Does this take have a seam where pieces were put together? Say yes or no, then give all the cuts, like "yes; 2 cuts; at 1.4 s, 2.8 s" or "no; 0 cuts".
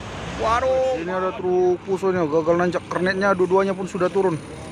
yes; 1 cut; at 1.0 s